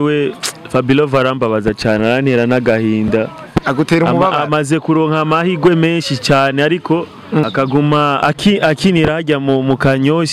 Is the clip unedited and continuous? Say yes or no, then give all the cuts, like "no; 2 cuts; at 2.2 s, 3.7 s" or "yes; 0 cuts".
no; 2 cuts; at 7.4 s, 8.2 s